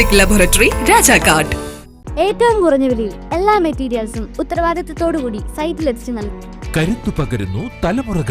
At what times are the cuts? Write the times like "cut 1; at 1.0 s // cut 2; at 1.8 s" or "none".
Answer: none